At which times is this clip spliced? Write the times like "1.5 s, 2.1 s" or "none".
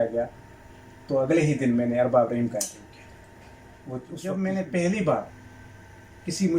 4.2 s